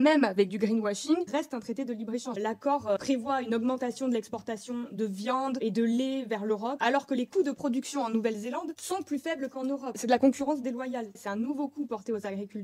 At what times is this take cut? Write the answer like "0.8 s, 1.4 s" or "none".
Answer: none